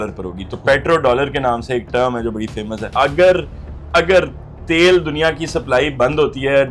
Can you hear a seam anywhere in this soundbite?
yes; 1 cut; at 2.9 s

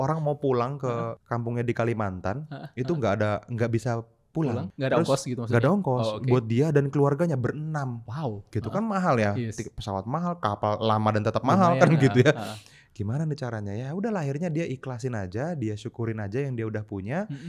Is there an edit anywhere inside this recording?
yes; 2 cuts; at 1.2 s, 4.7 s

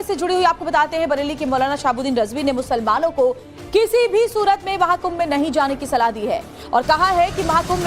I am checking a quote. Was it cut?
yes; 1 cut; at 2.4 s

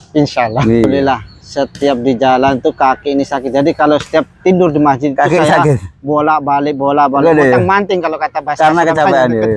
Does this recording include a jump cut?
yes; 1 cut; at 1.0 s

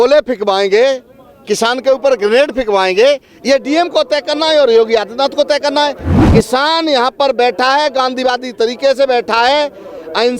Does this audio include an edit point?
yes; 1 cut; at 6.1 s

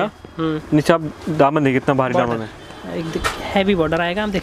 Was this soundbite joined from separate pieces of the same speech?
no; 0 cuts

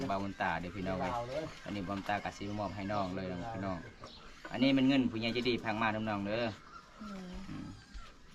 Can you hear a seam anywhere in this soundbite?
no; 0 cuts

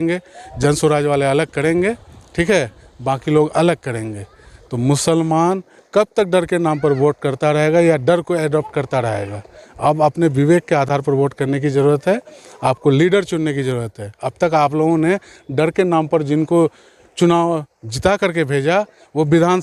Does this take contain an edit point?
no; 0 cuts

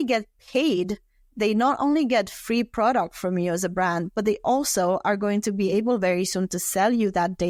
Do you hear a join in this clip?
no; 0 cuts

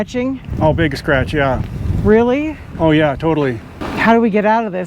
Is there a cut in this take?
yes; 1 cut; at 3.9 s

